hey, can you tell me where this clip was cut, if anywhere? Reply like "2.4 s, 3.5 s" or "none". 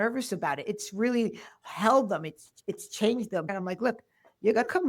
3.5 s